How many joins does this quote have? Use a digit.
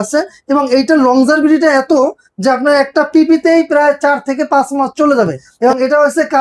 1